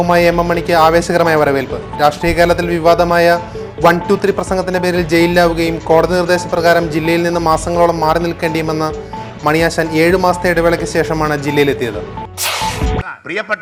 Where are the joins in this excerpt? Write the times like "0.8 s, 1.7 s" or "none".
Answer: none